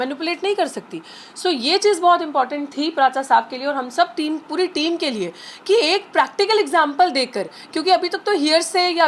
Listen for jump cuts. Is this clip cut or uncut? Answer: uncut